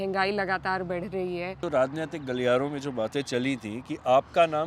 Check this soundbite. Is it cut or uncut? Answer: cut